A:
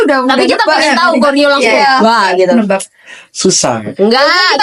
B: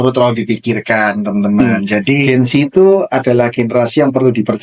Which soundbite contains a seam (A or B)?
B